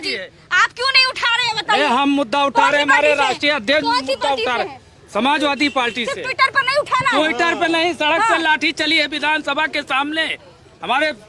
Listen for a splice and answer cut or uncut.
uncut